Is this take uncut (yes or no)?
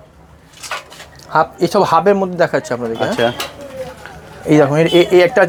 yes